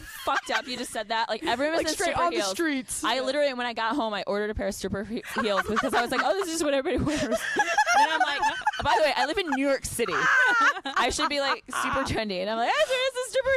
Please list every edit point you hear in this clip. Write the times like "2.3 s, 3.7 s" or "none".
none